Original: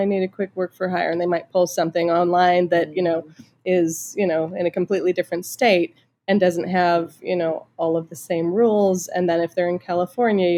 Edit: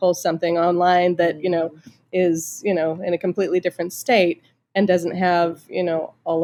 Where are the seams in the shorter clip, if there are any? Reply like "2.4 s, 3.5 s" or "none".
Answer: none